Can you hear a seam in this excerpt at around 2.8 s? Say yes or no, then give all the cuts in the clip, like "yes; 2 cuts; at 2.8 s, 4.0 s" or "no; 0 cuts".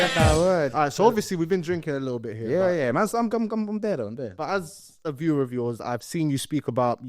no; 0 cuts